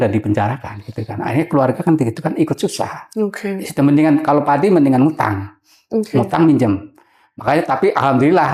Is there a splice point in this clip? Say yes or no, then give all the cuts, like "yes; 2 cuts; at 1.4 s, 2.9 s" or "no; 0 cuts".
no; 0 cuts